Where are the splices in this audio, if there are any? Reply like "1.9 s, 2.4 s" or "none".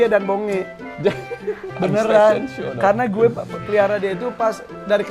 0.9 s